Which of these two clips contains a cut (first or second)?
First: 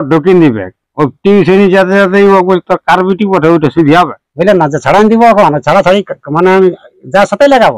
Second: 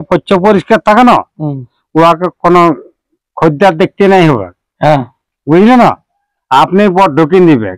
first